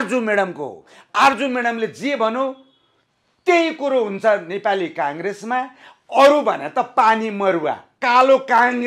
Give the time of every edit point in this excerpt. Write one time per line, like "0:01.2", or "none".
0:07.9

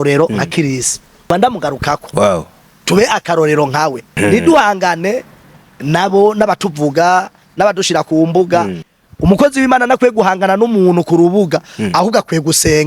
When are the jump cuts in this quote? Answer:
0:01.3
0:04.2
0:08.9

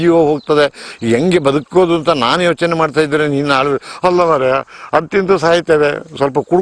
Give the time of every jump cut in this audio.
none

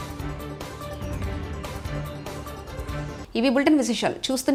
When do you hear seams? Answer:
none

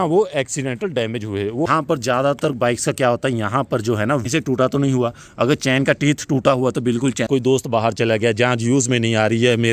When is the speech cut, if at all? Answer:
0:01.7
0:04.3
0:07.2

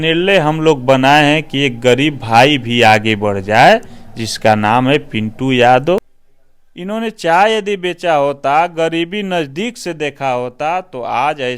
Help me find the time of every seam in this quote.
0:06.0

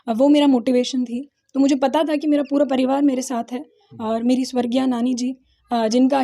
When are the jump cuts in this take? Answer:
none

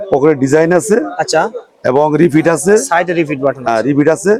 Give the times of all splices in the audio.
none

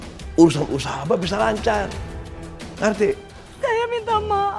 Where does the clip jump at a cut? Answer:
0:03.4

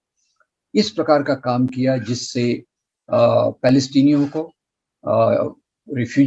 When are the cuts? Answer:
none

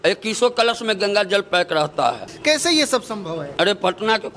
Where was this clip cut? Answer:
0:02.3
0:03.4

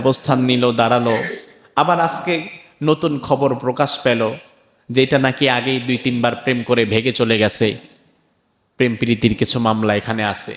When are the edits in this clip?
none

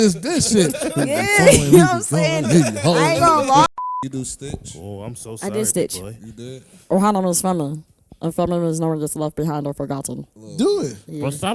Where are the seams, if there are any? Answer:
0:03.7
0:10.4

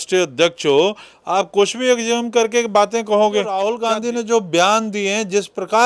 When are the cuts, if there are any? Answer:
0:03.7

